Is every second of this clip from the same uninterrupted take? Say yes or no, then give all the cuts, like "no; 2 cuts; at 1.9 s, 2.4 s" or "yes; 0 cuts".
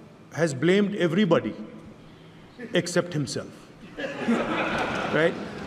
yes; 0 cuts